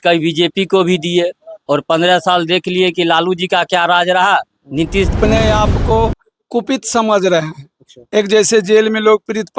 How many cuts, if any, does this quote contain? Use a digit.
1